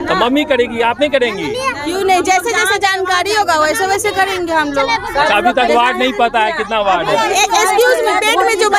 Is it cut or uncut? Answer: uncut